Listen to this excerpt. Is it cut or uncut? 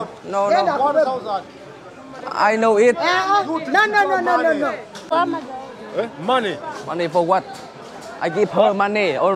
cut